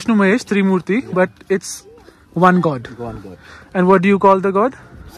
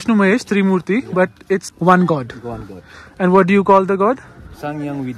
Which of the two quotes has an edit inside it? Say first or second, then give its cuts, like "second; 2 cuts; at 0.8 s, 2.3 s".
second; 1 cut; at 1.7 s